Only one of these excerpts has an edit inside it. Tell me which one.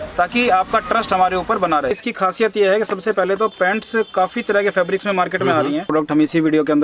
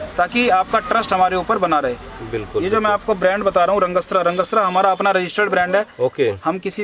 first; 2 cuts; at 2.0 s, 5.9 s

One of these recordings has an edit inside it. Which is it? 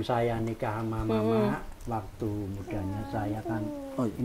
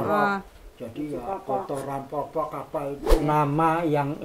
second; 1 cut; at 3.1 s

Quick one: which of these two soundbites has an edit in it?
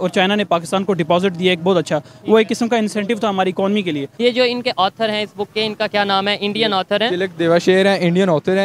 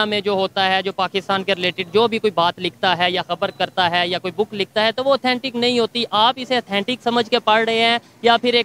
first; 1 cut; at 4.1 s

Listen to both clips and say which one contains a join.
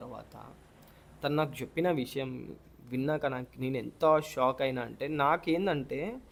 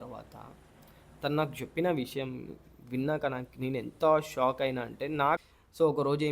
second; 1 cut; at 5.4 s

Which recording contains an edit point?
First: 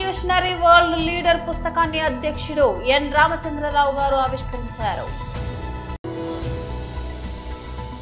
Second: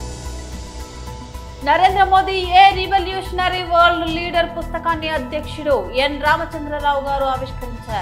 second; 1 cut; at 1.4 s

